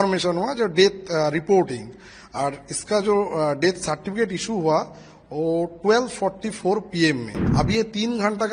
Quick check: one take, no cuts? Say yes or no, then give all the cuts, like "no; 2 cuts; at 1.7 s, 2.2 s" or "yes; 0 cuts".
no; 1 cut; at 7.4 s